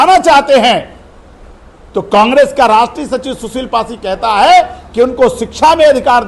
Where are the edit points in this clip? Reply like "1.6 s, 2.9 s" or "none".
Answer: none